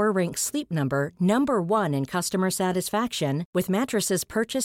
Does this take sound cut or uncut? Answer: uncut